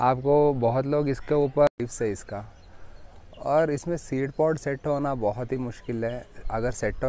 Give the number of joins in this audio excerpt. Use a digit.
1